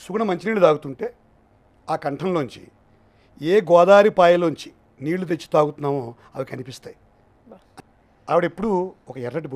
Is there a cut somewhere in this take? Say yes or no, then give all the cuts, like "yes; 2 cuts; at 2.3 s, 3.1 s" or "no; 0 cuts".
yes; 1 cut; at 7.8 s